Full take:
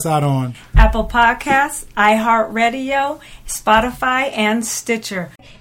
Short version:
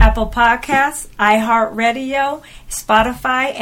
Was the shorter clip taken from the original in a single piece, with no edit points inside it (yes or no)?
yes